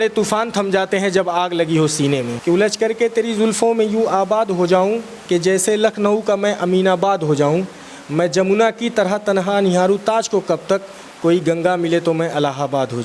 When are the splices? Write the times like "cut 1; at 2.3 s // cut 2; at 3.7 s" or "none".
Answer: cut 1; at 2.3 s